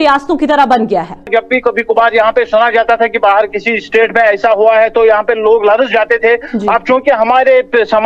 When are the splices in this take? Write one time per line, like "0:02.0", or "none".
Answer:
0:01.3